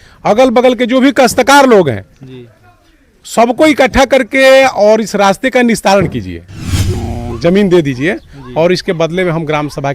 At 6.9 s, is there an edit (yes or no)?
yes